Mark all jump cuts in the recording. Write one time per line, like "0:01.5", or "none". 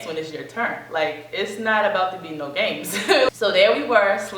0:03.3